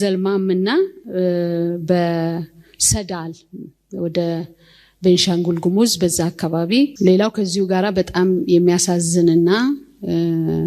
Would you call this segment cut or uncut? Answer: cut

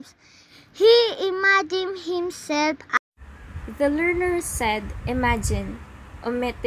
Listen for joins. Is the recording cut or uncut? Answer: uncut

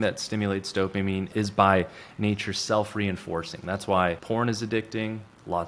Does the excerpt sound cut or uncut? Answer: cut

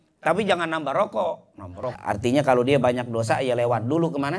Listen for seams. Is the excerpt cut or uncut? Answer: cut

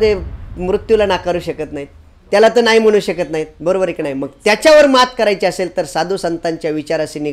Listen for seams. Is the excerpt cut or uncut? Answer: uncut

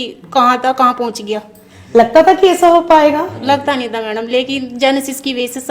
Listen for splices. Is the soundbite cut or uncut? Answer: uncut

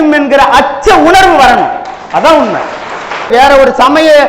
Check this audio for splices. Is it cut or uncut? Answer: cut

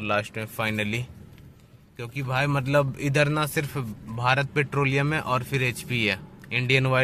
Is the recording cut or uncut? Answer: uncut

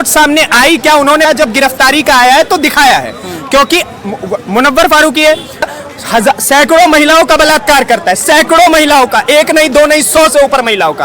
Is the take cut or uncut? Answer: cut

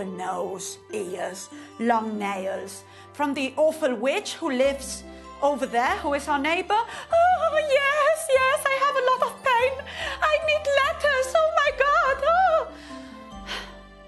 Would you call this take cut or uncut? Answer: cut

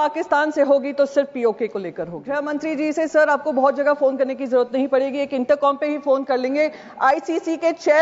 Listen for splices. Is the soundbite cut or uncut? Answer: cut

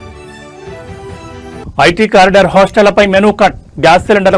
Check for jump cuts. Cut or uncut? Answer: cut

